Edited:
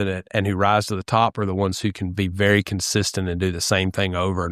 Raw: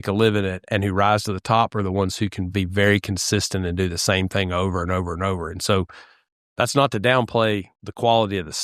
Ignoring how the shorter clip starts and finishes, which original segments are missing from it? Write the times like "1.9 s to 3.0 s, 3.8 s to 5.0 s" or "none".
none